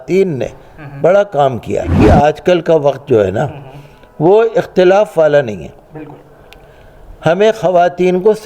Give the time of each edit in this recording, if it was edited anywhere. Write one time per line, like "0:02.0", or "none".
0:02.0